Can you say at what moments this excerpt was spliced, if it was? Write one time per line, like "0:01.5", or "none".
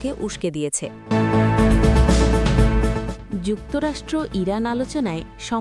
0:00.9